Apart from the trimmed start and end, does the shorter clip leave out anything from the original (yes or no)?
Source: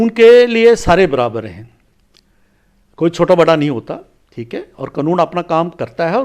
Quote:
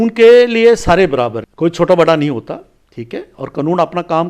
yes